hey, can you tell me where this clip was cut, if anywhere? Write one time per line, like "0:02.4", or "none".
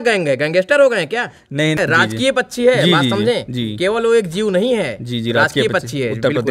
0:01.8